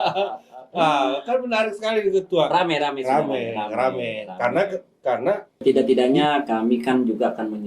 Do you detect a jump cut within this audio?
yes; 1 cut; at 5.6 s

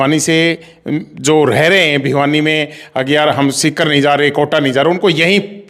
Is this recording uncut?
yes; 0 cuts

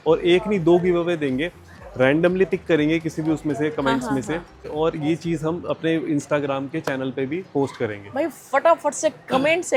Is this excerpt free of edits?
yes; 0 cuts

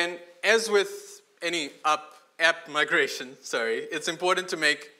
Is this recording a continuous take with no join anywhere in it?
yes; 0 cuts

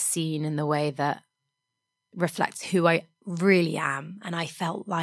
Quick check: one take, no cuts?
yes; 0 cuts

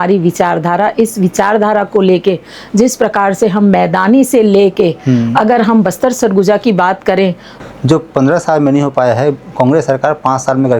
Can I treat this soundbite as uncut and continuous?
no; 1 cut; at 7.5 s

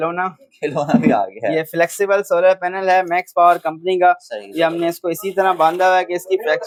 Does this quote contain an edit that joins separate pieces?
no; 0 cuts

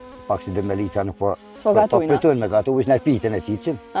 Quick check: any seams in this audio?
no; 0 cuts

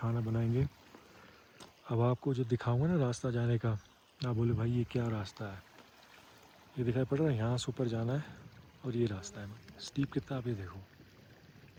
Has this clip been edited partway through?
no; 0 cuts

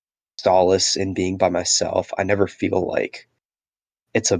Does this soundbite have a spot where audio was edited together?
no; 0 cuts

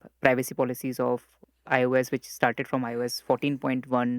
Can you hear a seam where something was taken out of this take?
yes; 1 cut; at 1.4 s

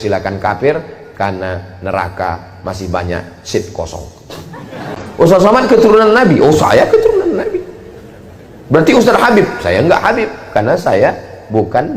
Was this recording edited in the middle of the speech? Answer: yes; 1 cut; at 4.9 s

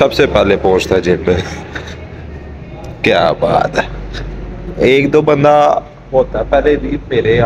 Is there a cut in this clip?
yes; 1 cut; at 1.9 s

